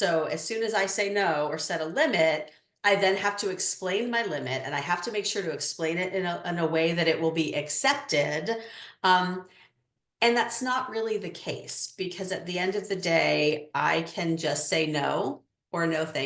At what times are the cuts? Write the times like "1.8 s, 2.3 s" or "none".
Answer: none